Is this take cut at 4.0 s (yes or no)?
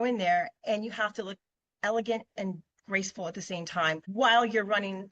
yes